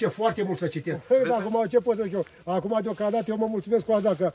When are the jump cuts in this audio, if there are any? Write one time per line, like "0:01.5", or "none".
0:00.9